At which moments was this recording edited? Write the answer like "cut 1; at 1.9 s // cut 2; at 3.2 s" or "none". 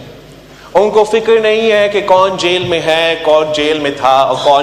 none